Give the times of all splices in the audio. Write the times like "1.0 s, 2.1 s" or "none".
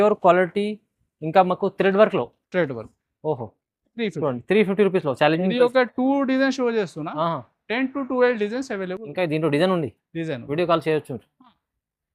none